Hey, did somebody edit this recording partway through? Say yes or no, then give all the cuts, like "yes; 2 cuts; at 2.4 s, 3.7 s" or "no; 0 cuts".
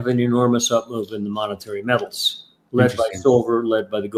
no; 0 cuts